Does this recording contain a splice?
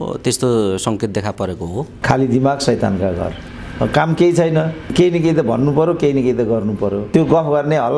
yes; 2 cuts; at 1.9 s, 7.0 s

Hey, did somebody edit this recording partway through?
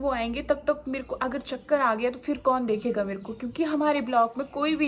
no; 0 cuts

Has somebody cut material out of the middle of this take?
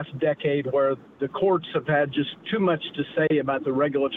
no; 0 cuts

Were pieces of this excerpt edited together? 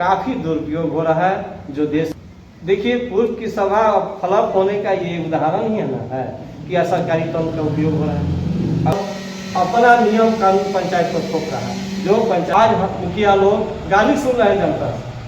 yes; 3 cuts; at 2.1 s, 8.9 s, 12.5 s

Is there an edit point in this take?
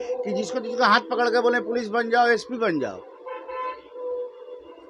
no; 0 cuts

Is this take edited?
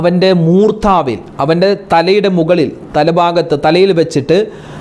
no; 0 cuts

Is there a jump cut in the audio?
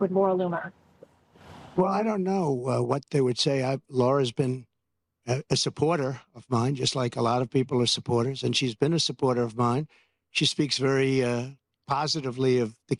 no; 0 cuts

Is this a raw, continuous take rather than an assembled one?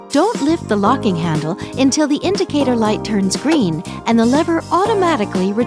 yes; 0 cuts

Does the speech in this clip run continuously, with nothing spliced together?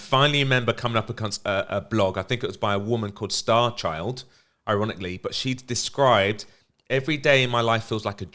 yes; 0 cuts

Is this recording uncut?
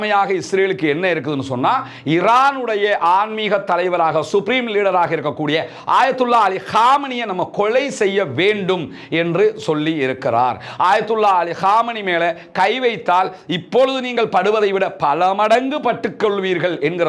yes; 0 cuts

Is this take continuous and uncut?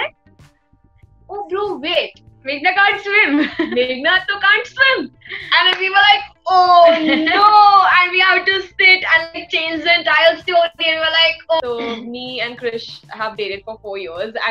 no; 1 cut; at 11.6 s

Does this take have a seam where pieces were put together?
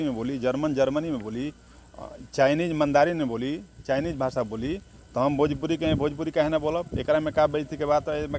no; 0 cuts

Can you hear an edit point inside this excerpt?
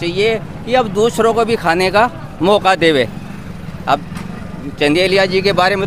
no; 0 cuts

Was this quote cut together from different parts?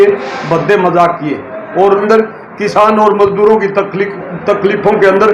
yes; 1 cut; at 2.0 s

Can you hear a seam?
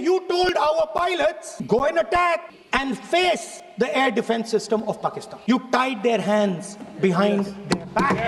yes; 4 cuts; at 1.5 s, 2.6 s, 3.6 s, 5.3 s

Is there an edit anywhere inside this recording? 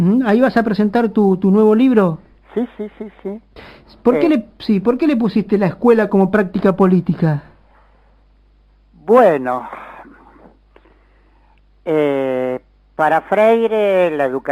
yes; 1 cut; at 12.7 s

